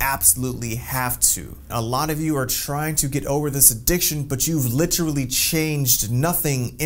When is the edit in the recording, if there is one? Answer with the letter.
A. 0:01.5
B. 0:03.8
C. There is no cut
A